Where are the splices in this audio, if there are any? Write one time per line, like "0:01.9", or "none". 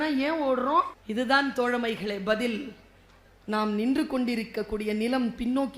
0:01.0

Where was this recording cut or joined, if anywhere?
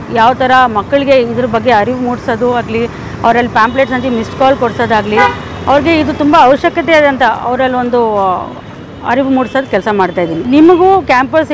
0:10.4

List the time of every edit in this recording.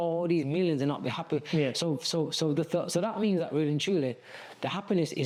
none

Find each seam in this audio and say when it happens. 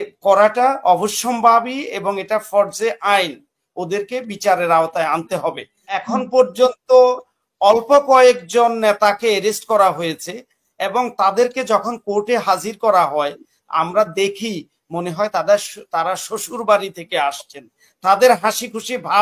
0:05.9

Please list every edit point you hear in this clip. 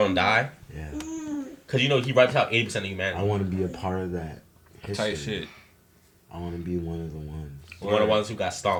none

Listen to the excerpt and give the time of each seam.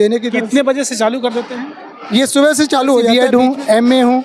0:03.1

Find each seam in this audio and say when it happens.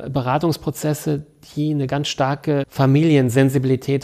0:02.7

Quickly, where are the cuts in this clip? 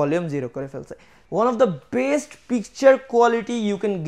0:01.1

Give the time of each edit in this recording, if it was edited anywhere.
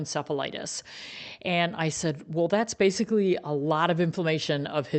none

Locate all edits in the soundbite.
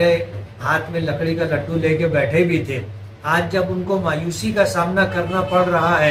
none

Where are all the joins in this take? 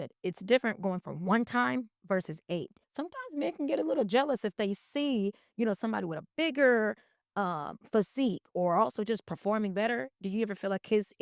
0:02.8

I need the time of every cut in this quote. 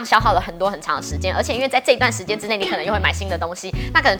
none

